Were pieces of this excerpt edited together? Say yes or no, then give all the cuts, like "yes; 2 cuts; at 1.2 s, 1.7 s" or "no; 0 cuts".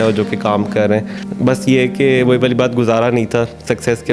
yes; 1 cut; at 1.2 s